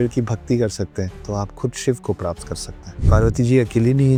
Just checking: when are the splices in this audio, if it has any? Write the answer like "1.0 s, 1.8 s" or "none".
none